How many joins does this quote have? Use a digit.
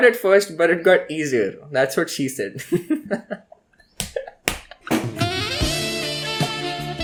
0